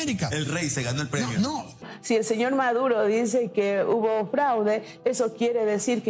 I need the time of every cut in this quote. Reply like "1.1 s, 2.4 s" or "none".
1.9 s

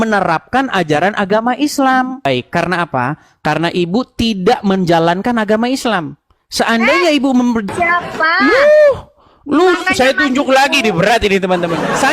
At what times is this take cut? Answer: 2.2 s, 7.7 s

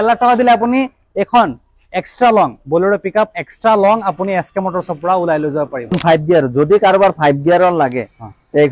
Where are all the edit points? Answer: 6.0 s

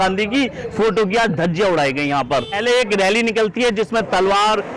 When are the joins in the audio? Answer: 2.6 s

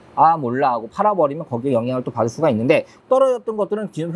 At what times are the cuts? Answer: 2.9 s

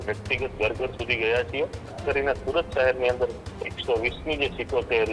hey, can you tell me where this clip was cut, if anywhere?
2.0 s

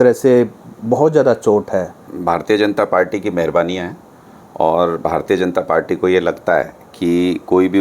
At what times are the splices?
2.1 s

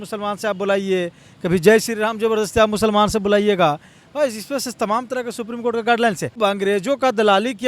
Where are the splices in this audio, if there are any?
6.4 s

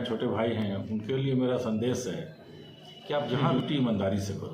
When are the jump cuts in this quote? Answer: 3.4 s

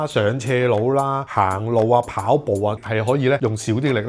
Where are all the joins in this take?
2.8 s

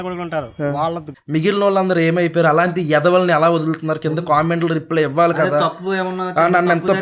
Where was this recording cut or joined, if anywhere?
1.1 s

